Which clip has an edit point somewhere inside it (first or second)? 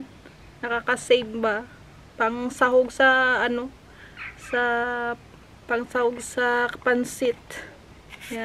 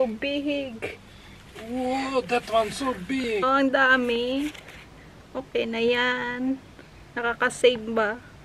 second